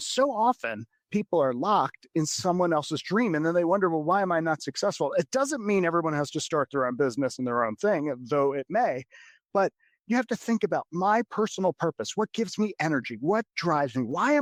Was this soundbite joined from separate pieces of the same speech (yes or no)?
no